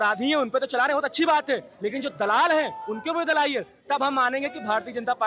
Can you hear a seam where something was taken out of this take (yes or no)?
no